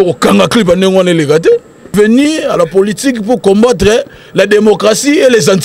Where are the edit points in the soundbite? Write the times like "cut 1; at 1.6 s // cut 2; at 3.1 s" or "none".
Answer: cut 1; at 1.9 s